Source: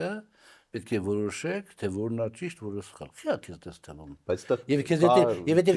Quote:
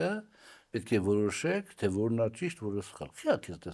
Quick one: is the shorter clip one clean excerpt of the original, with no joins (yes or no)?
yes